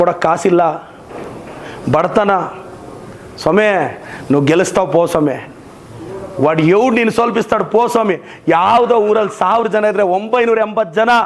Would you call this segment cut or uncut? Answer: uncut